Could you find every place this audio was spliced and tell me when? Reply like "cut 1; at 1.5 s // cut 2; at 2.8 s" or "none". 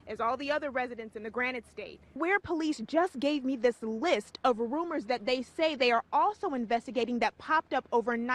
cut 1; at 2.1 s